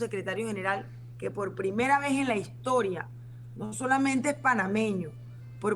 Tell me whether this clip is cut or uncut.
uncut